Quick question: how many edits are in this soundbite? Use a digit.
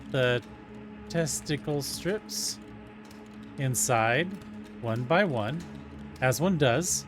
0